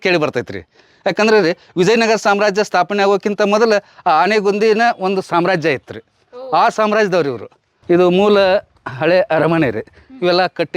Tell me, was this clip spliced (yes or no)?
yes